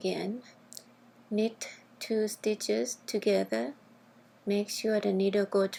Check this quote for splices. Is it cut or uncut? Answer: uncut